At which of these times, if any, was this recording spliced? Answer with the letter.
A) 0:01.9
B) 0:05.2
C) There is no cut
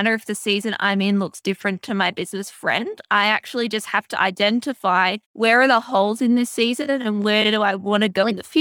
B